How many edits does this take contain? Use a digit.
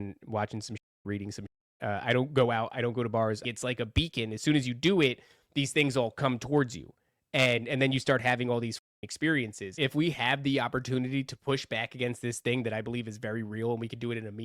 2